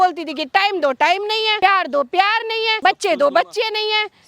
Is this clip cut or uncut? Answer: cut